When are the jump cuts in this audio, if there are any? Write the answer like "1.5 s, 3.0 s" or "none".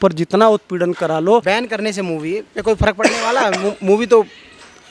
1.4 s